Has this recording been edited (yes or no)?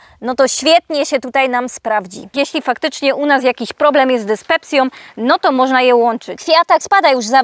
yes